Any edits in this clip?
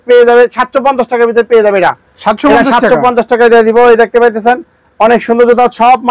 no; 0 cuts

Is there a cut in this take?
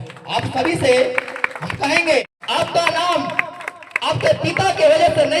yes; 1 cut; at 2.3 s

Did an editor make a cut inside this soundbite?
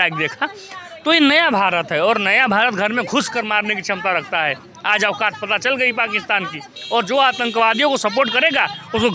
no; 0 cuts

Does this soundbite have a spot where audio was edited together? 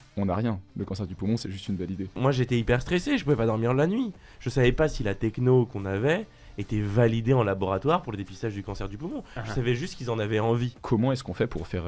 yes; 2 cuts; at 2.2 s, 10.8 s

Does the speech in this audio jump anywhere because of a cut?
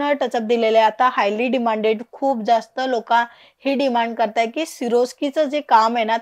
no; 0 cuts

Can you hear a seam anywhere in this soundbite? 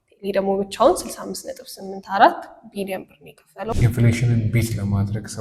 yes; 1 cut; at 3.7 s

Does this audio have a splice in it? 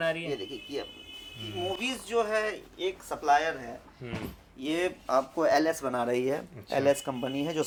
no; 0 cuts

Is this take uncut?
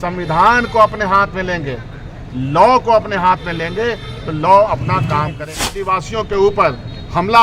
no; 1 cut; at 5.8 s

